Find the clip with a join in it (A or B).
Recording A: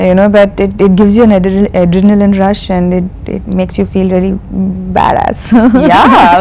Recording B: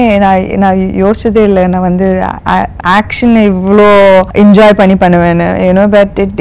B